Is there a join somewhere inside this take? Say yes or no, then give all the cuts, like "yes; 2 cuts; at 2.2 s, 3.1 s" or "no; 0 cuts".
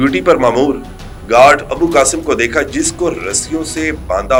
no; 0 cuts